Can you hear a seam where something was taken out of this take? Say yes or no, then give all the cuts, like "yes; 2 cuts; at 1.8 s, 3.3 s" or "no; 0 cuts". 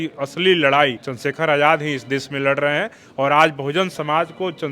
yes; 1 cut; at 1.1 s